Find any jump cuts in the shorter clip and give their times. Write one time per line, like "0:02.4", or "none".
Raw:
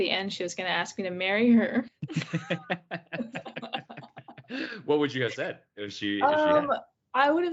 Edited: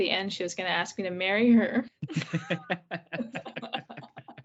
none